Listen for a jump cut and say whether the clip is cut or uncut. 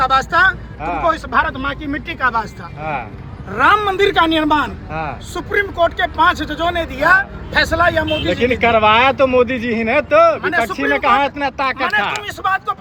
uncut